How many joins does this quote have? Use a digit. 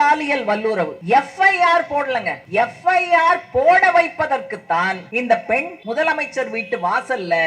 4